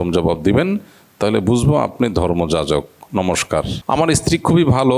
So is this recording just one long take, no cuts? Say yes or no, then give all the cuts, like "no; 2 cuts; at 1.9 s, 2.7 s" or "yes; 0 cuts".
no; 1 cut; at 3.8 s